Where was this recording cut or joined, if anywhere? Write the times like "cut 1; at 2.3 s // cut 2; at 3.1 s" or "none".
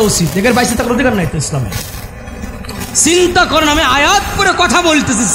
none